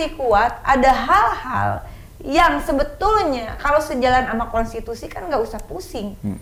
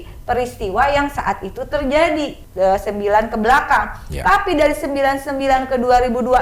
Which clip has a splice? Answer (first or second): second